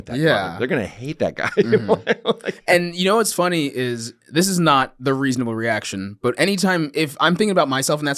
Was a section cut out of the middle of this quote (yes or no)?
no